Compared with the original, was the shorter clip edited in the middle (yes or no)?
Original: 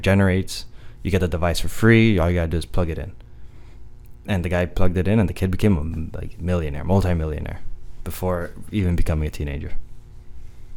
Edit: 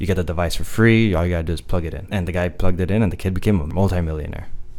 yes